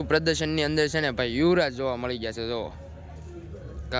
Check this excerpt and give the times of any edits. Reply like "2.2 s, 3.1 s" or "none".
none